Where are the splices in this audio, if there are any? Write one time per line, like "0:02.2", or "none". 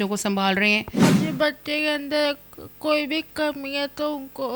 0:00.9